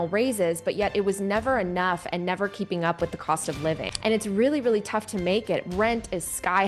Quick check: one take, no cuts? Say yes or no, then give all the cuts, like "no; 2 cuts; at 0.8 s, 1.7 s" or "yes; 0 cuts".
no; 1 cut; at 3.9 s